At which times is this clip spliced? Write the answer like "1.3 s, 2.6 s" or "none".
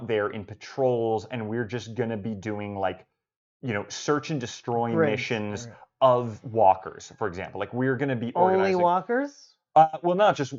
none